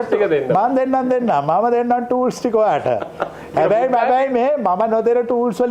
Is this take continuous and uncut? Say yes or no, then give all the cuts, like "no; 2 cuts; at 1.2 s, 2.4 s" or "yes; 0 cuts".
yes; 0 cuts